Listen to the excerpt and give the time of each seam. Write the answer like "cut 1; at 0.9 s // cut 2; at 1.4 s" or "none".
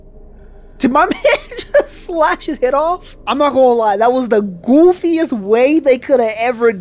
cut 1; at 3.1 s